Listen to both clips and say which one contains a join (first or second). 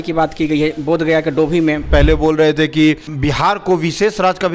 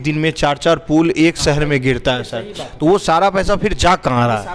first